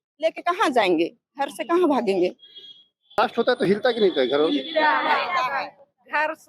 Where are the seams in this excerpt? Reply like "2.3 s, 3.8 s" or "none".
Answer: 3.2 s